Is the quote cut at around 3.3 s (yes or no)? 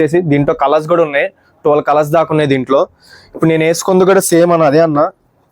no